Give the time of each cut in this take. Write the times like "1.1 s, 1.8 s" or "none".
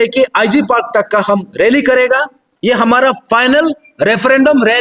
2.4 s